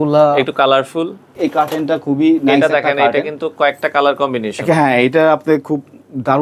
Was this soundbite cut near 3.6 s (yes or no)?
no